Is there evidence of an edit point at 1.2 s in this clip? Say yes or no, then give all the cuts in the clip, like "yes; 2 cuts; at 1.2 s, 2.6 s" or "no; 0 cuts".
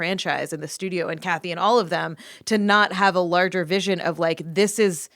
yes; 1 cut; at 1.2 s